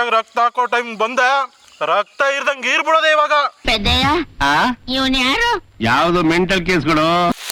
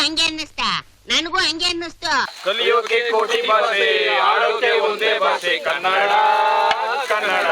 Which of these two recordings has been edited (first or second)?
second